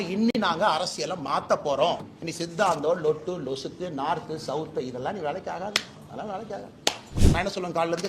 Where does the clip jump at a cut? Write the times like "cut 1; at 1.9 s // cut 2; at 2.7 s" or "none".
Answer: cut 1; at 2.2 s // cut 2; at 7.2 s